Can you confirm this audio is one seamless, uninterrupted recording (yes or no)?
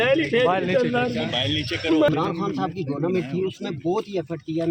no